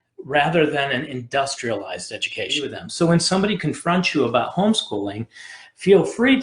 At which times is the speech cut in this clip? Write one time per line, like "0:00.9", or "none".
0:02.8